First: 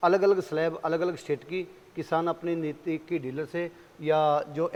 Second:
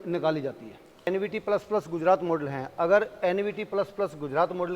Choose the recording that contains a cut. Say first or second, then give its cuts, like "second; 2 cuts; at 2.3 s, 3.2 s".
second; 1 cut; at 1.1 s